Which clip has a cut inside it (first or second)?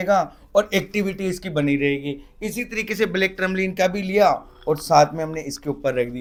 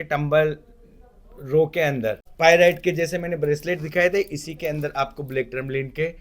second